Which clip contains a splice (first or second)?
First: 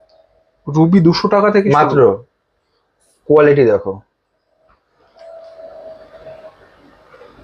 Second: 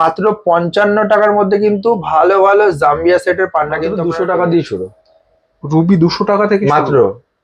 second